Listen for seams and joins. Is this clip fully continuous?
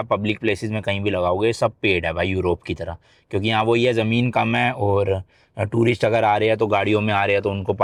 yes; 0 cuts

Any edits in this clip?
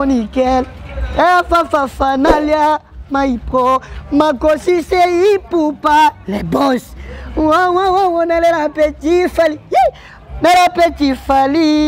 no; 0 cuts

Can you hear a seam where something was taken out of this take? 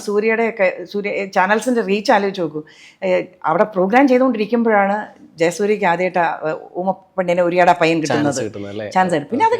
no; 0 cuts

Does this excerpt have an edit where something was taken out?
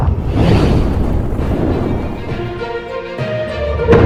no; 0 cuts

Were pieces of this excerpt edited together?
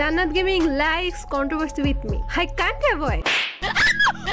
no; 0 cuts

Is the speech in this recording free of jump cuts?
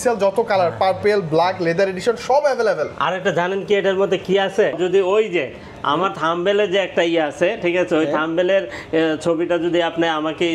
no; 1 cut; at 4.8 s

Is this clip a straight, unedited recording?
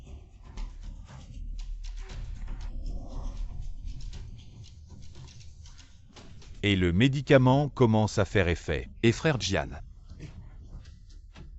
yes; 0 cuts

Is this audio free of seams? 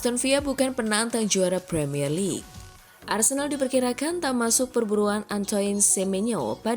no; 1 cut; at 2.6 s

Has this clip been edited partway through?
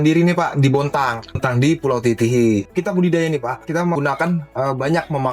yes; 3 cuts; at 1.4 s, 2.7 s, 3.9 s

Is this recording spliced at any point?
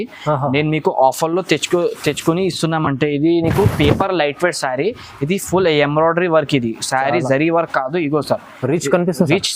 no; 0 cuts

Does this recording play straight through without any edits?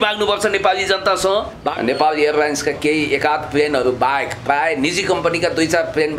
no; 1 cut; at 1.6 s

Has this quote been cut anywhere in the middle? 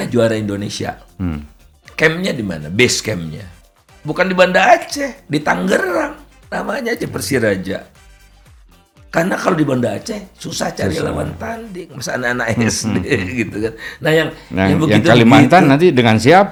no; 0 cuts

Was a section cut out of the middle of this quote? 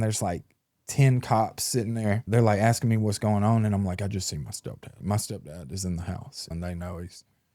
yes; 3 cuts; at 2.2 s, 5.0 s, 6.5 s

